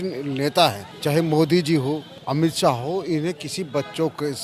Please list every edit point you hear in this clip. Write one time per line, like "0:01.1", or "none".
0:00.9
0:02.1